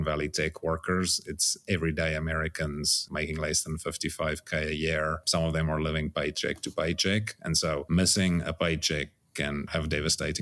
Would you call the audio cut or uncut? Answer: uncut